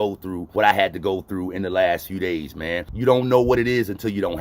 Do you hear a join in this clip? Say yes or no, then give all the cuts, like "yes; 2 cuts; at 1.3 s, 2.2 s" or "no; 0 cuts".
yes; 1 cut; at 2.9 s